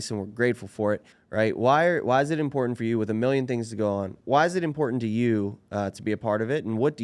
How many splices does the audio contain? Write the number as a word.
two